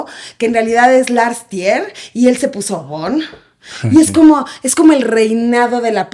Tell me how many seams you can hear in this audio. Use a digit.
0